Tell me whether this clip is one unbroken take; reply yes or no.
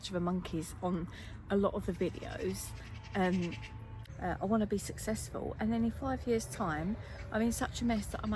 no